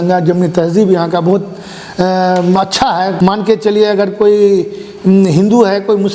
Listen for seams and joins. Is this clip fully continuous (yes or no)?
no